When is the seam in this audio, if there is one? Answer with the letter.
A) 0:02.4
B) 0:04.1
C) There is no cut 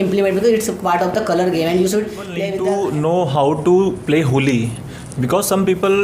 A